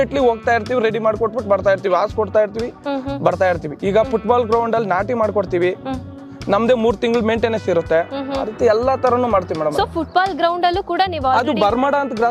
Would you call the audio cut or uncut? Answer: uncut